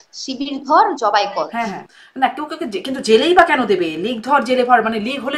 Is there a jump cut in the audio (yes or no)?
yes